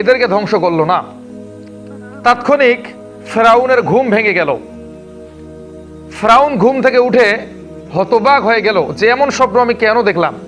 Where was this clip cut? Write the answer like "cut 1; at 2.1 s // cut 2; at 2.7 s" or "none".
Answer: none